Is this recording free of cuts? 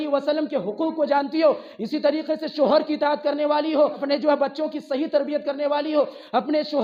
yes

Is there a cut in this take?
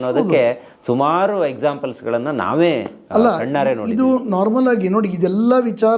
no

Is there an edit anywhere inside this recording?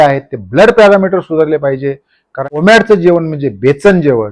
yes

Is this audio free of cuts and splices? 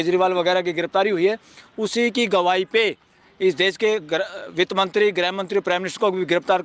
yes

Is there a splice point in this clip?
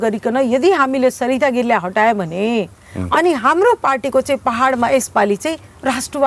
no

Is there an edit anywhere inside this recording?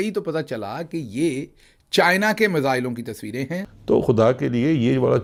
no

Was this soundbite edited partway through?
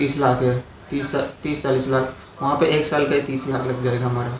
no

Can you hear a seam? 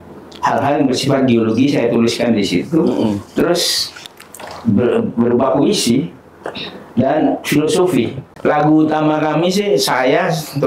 yes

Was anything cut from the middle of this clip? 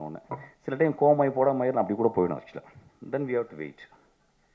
no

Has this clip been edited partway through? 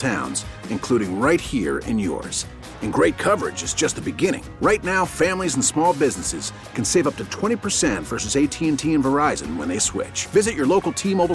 no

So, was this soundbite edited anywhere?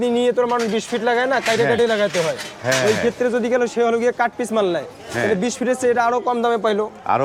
no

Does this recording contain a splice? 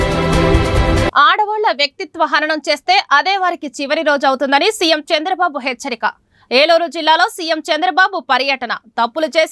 yes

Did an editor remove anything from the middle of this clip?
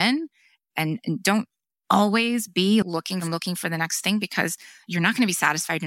yes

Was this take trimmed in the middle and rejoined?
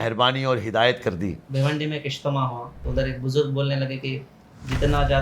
yes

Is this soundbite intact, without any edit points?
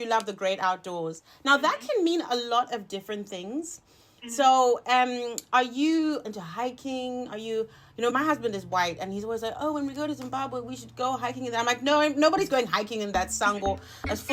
no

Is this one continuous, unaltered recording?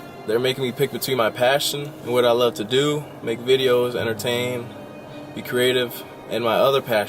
yes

